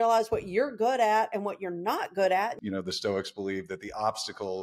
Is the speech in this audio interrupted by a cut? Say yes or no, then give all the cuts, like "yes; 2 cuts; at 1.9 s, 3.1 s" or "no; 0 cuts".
yes; 1 cut; at 2.5 s